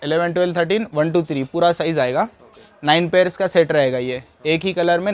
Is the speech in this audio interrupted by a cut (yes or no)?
no